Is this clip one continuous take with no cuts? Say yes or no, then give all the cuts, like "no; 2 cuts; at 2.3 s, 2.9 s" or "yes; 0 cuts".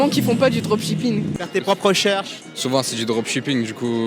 no; 1 cut; at 1.4 s